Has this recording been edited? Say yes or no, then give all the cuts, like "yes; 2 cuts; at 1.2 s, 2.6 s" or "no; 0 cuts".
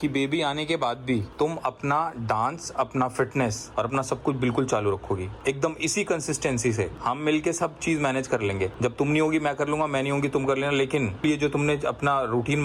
no; 0 cuts